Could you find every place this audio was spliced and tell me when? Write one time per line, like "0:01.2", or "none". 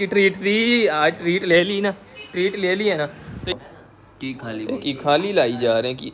0:01.7
0:03.5